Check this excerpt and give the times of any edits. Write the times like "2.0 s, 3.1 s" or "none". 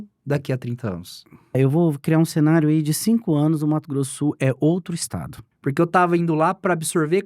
1.5 s, 5.5 s